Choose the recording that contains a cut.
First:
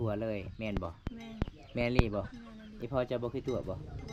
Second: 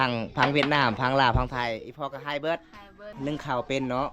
second; 1 cut; at 3.1 s

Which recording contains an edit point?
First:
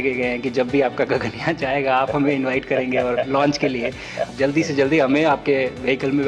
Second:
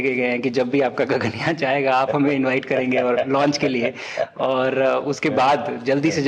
first; 1 cut; at 4.3 s

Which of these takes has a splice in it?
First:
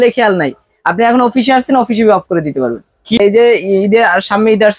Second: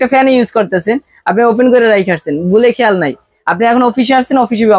first; 1 cut; at 3.2 s

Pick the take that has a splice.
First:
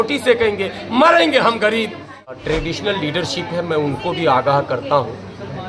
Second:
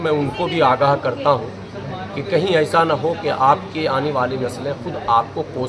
first; 1 cut; at 2.3 s

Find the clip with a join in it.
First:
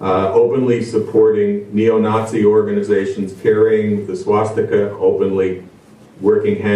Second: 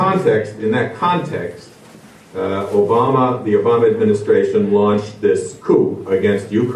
second; 1 cut; at 1.2 s

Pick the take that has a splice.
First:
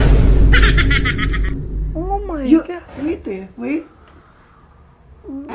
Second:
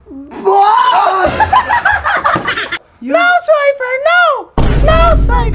second; 1 cut; at 2.8 s

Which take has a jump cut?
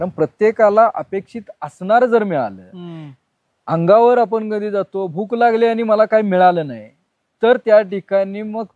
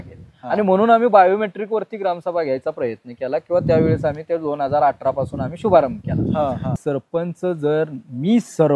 second; 1 cut; at 6.8 s

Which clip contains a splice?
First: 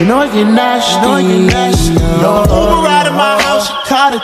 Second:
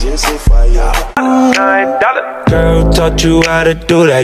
second; 1 cut; at 1.1 s

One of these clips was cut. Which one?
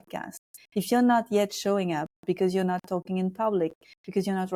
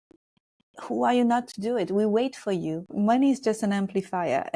second; 1 cut; at 2.9 s

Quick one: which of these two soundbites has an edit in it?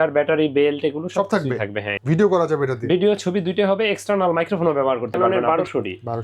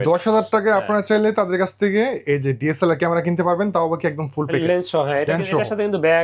first; 2 cuts; at 1.9 s, 5.2 s

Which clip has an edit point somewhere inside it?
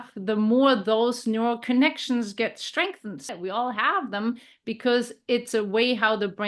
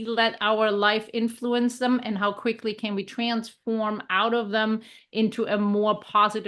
first; 1 cut; at 3.2 s

